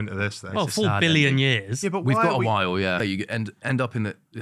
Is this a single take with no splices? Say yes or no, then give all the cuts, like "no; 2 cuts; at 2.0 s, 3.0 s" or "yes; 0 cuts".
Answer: no; 1 cut; at 3.0 s